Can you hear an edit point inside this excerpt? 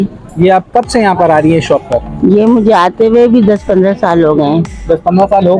no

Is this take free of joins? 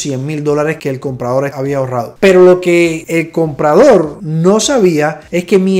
yes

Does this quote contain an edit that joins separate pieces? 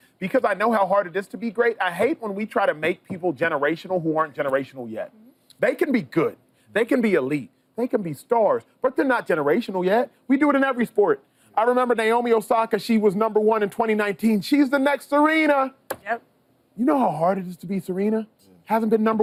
no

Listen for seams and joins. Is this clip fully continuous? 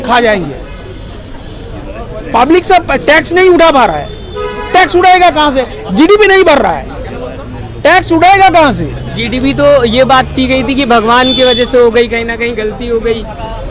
yes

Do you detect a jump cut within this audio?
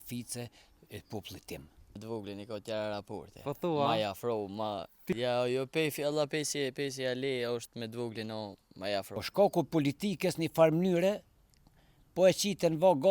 yes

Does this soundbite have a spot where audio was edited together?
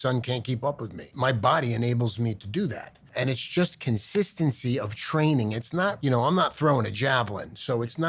yes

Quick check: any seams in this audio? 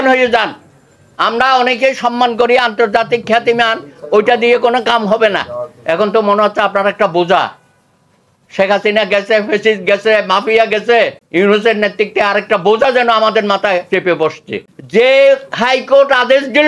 yes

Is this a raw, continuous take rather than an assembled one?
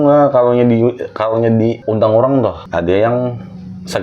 no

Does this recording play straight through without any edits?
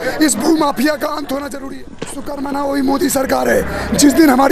no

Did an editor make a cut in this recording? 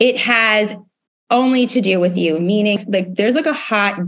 yes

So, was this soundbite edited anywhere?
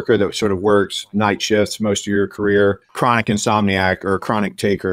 yes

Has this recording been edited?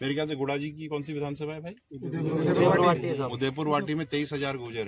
no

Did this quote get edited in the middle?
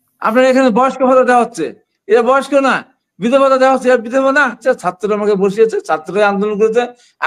yes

